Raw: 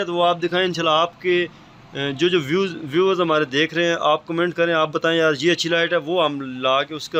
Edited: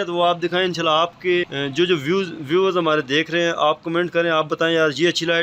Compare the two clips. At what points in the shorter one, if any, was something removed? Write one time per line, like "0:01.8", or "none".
0:01.6